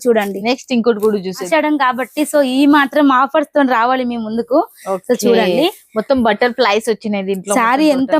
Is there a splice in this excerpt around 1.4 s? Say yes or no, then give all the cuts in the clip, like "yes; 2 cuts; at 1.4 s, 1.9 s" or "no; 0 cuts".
yes; 1 cut; at 1.4 s